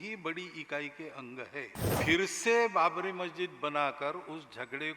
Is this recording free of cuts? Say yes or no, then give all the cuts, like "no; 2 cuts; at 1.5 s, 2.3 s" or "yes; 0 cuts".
no; 1 cut; at 1.9 s